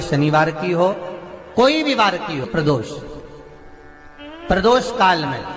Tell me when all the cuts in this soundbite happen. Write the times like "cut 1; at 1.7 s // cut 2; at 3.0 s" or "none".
cut 1; at 2.5 s